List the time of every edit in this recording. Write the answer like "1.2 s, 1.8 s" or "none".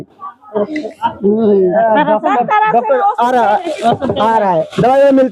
1.0 s